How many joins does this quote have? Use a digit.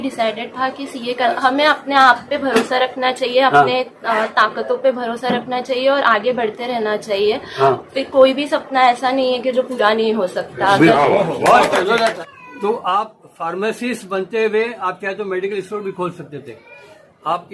2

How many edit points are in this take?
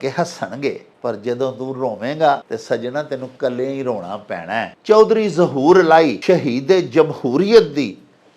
4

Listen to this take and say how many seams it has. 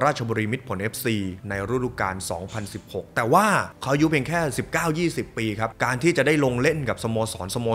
0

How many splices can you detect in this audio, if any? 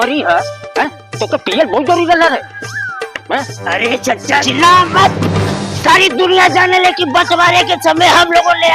1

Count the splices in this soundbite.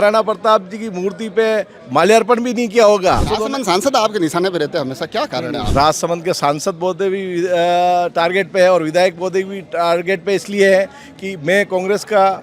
2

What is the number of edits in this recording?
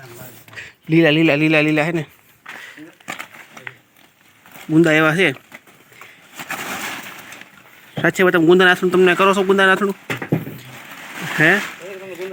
0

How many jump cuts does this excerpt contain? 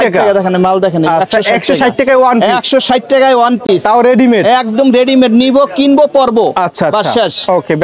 0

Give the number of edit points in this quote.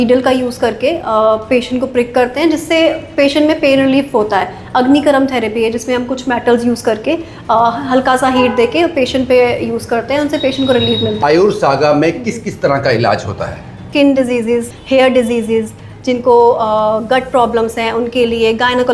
3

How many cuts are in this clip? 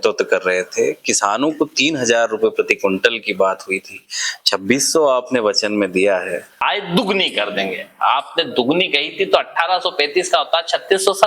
1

